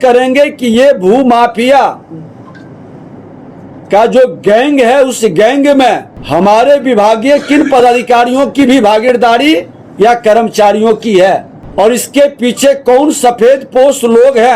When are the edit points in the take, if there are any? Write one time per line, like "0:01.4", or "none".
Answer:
0:06.1
0:11.6